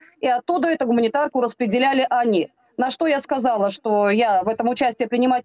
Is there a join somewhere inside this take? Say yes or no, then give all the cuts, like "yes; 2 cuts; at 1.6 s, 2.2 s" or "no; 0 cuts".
no; 0 cuts